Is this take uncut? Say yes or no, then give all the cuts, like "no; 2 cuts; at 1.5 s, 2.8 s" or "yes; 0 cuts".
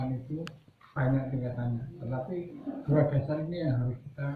yes; 0 cuts